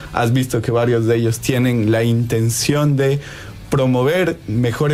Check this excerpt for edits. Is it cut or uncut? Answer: uncut